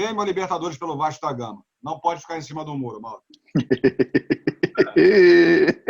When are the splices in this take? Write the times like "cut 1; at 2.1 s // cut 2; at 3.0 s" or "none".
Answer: none